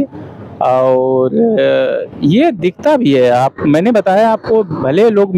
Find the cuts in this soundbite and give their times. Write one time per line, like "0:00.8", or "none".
none